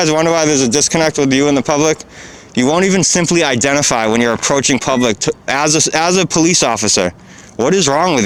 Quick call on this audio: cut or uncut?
uncut